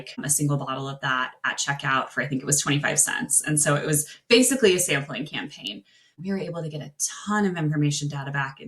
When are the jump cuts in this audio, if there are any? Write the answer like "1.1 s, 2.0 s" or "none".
6.2 s

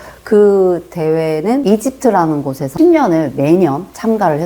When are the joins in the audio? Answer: 2.6 s

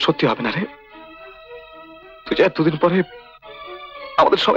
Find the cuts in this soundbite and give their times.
none

